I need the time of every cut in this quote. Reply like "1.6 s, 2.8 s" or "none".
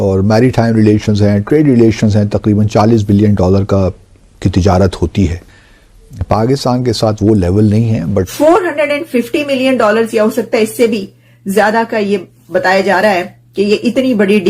8.3 s